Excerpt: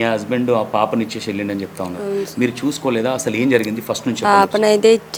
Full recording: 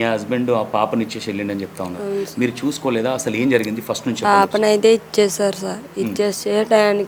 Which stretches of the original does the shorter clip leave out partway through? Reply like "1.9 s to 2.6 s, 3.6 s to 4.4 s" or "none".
none